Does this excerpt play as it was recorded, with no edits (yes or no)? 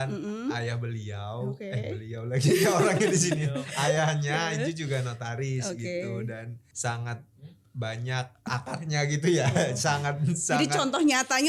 no